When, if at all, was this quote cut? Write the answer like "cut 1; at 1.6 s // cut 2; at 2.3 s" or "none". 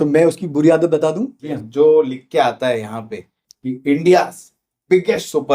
cut 1; at 1.4 s